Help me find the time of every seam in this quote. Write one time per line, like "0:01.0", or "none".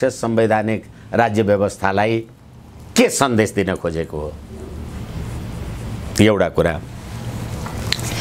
none